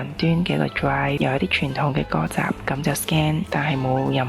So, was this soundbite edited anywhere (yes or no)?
yes